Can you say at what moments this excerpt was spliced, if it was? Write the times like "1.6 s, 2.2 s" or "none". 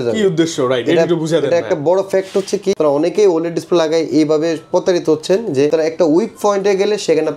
2.8 s, 5.7 s